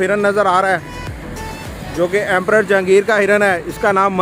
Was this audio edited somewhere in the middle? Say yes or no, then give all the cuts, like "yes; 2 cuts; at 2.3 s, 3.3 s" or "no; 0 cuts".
no; 0 cuts